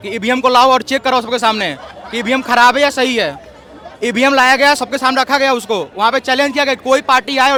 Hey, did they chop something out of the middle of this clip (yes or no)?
no